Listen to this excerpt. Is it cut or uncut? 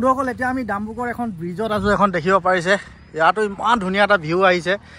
uncut